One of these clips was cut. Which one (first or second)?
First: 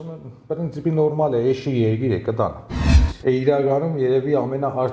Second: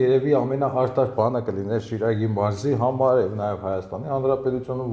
first